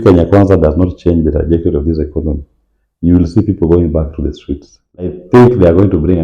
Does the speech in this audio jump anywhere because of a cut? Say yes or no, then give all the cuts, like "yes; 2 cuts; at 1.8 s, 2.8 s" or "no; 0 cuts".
yes; 1 cut; at 5.2 s